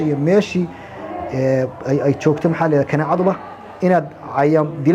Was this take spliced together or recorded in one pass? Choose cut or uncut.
uncut